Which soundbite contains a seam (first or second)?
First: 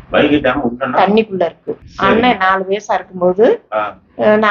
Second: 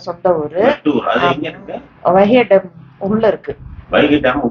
first